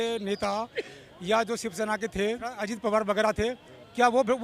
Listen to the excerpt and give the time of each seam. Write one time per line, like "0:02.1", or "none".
0:02.6